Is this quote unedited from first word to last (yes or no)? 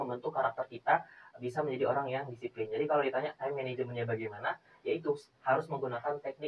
yes